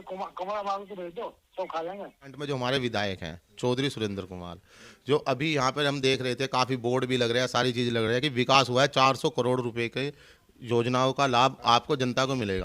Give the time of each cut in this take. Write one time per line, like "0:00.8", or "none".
0:02.4